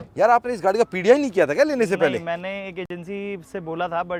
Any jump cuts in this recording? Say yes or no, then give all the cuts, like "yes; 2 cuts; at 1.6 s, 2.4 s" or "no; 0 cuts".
no; 0 cuts